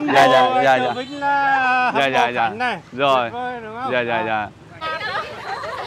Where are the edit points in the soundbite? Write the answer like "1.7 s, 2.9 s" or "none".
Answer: 5.0 s